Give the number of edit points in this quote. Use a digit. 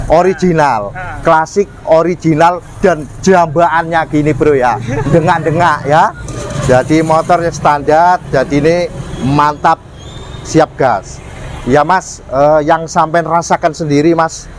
0